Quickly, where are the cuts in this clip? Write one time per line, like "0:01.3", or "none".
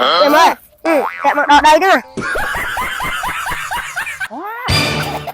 0:04.2